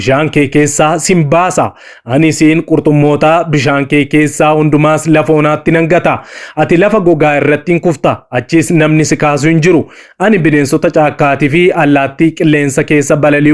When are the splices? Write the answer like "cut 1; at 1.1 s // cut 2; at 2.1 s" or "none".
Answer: none